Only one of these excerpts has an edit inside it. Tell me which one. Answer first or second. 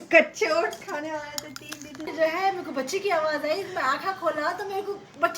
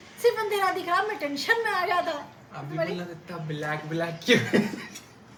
first